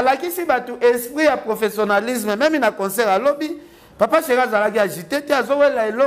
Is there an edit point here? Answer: no; 0 cuts

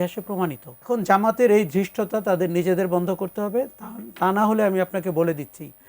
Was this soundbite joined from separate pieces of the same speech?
yes; 1 cut; at 0.9 s

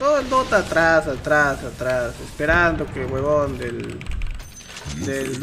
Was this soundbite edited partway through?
no; 0 cuts

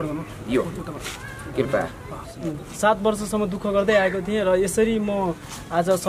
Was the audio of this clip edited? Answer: yes; 1 cut; at 2.6 s

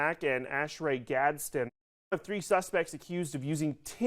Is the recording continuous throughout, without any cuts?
no; 1 cut; at 1.7 s

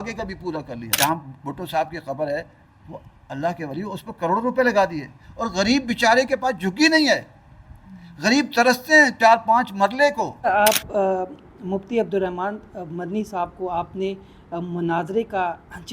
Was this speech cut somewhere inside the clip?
yes; 2 cuts; at 0.9 s, 10.4 s

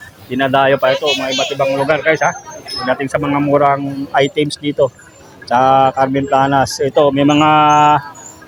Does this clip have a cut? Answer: no; 0 cuts

